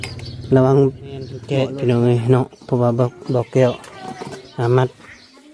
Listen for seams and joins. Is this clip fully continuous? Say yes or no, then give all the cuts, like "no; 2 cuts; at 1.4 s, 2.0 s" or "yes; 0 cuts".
no; 1 cut; at 1.4 s